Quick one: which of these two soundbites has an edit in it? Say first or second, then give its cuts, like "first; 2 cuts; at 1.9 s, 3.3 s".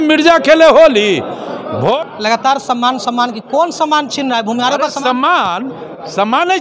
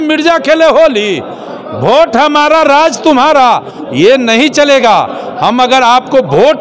first; 1 cut; at 1.9 s